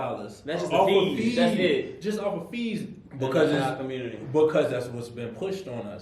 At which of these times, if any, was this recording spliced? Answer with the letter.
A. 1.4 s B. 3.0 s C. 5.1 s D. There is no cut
B